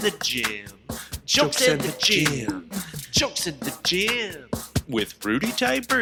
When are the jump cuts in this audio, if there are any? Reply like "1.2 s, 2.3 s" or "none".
none